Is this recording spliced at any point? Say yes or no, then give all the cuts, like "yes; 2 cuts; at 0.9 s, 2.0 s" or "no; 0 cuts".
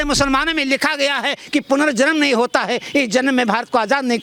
no; 0 cuts